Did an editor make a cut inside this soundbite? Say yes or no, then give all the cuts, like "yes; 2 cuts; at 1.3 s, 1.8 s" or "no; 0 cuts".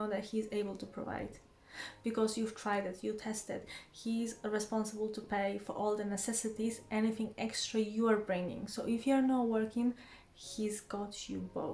no; 0 cuts